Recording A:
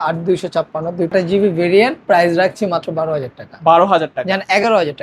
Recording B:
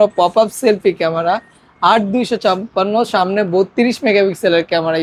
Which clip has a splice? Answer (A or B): A